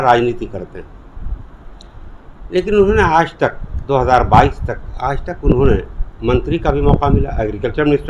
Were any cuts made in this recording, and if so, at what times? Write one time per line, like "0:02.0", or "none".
none

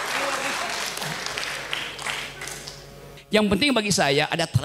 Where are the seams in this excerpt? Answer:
0:03.1

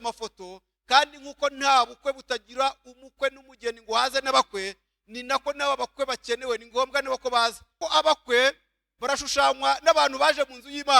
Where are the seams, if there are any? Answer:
0:07.8

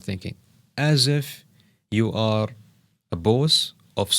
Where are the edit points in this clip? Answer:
none

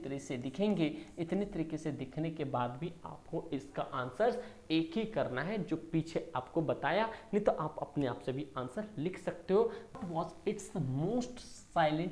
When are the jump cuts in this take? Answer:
0:10.0

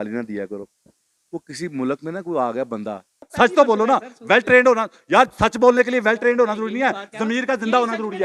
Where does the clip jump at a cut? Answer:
0:03.2

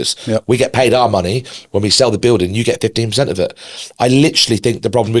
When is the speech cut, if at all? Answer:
none

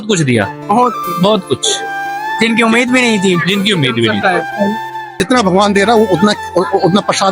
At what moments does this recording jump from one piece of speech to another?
0:05.1

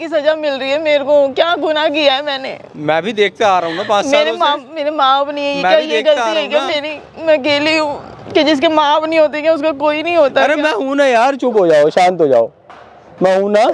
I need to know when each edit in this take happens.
none

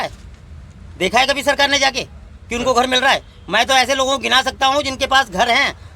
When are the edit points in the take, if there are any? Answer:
none

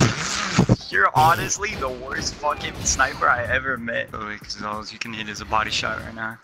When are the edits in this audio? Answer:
0:04.1

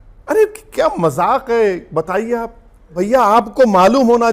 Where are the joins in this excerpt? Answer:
0:03.0

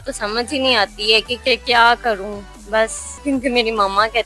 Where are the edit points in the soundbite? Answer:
0:03.1

